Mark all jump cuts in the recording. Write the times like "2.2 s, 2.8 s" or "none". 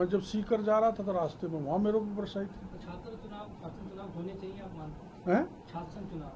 none